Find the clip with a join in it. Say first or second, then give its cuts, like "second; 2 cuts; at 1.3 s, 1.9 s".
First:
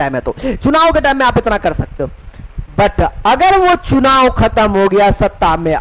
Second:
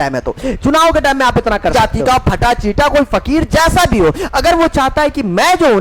second; 1 cut; at 2.2 s